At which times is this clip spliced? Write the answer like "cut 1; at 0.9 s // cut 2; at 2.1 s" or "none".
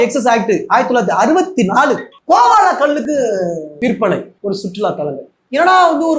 cut 1; at 3.7 s // cut 2; at 4.3 s